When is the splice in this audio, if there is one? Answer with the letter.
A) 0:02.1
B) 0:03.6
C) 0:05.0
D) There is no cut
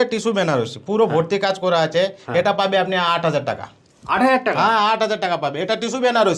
D